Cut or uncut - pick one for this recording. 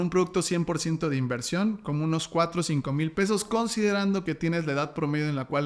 uncut